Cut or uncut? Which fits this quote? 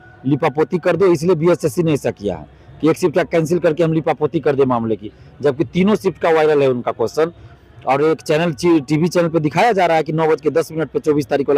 uncut